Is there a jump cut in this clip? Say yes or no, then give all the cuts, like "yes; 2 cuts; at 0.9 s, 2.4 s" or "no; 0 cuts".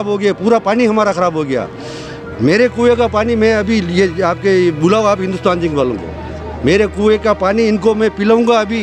no; 0 cuts